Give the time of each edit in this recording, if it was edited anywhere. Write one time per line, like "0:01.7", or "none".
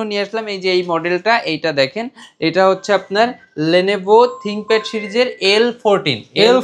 none